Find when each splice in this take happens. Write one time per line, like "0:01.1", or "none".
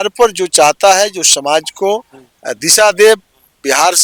none

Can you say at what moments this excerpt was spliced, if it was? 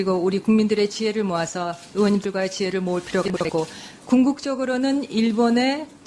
0:04.5

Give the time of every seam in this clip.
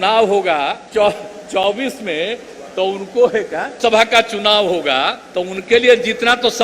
0:00.8
0:05.2

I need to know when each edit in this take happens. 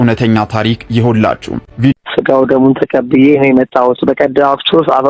0:01.9

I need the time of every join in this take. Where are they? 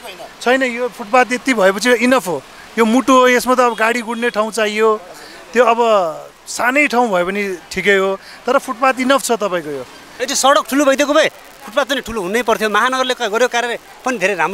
0:10.1

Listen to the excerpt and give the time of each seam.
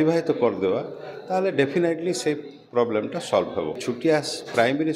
0:03.8

